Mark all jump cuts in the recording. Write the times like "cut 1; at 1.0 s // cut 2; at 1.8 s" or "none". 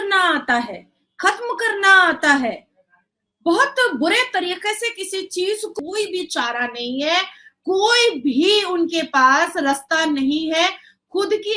cut 1; at 5.7 s